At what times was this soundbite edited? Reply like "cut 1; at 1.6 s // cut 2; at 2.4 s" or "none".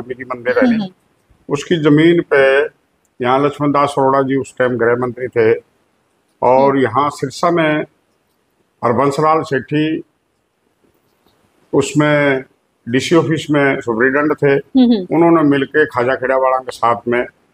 none